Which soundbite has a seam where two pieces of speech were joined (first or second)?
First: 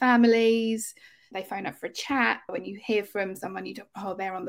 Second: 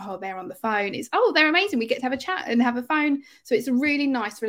first